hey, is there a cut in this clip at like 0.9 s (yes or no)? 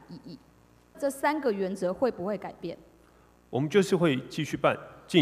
yes